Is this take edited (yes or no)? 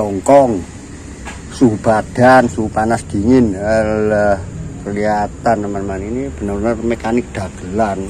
no